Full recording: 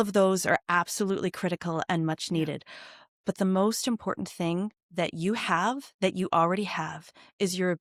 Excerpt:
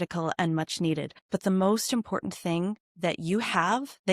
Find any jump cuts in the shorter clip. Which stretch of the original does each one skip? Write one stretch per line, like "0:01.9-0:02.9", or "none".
0:02.6-0:03.1